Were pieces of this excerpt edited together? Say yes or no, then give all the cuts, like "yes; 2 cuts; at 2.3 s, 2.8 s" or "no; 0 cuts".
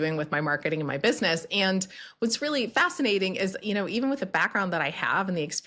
no; 0 cuts